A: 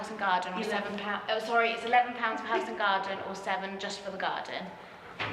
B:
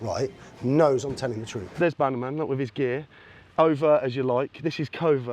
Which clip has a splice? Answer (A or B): B